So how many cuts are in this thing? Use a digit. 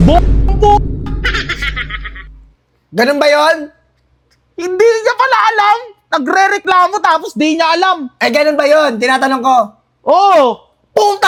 0